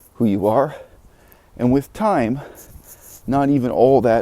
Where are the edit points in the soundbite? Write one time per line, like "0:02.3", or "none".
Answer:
none

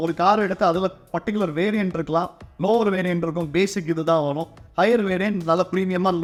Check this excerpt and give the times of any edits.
none

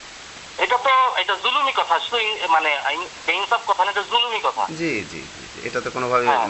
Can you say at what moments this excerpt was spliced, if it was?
none

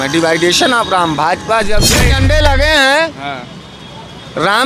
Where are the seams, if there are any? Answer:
0:01.9

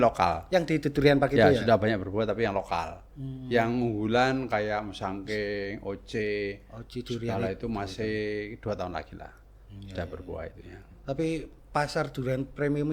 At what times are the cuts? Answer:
none

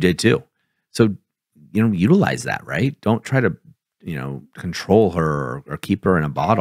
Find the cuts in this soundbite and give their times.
none

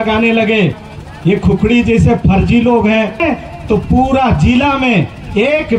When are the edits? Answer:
0:00.9
0:03.2

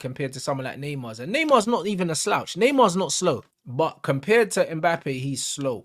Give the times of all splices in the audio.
0:03.5

